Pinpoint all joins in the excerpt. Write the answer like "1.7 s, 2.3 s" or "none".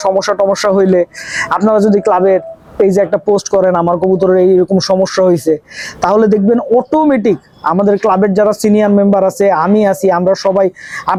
none